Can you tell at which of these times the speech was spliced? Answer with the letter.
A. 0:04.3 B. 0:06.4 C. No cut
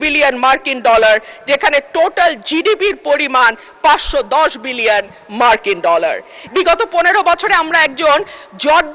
B